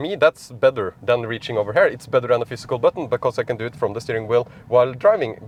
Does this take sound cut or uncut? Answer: uncut